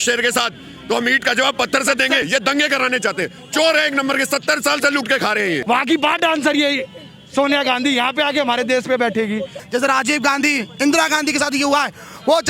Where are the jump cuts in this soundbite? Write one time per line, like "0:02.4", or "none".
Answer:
0:02.3
0:05.6
0:09.6